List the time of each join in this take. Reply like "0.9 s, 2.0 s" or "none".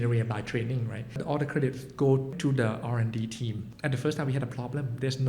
1.2 s, 2.3 s, 3.6 s